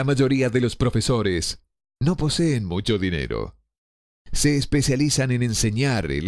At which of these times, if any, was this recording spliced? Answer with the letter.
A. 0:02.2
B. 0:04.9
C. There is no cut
C